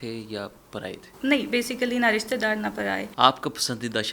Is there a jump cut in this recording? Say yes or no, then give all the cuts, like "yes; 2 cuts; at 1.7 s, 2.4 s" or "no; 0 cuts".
yes; 2 cuts; at 1.1 s, 3.1 s